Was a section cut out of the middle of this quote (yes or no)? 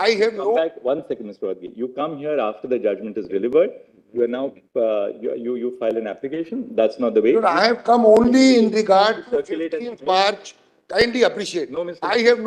no